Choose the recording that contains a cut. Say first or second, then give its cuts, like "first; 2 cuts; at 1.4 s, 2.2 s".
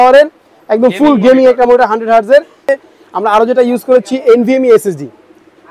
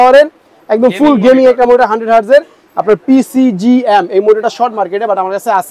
first; 1 cut; at 2.6 s